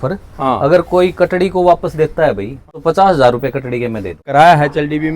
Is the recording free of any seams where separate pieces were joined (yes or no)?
no